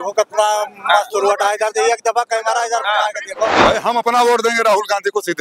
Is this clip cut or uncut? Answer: cut